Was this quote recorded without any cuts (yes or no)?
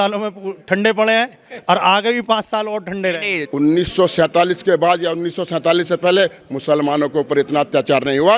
no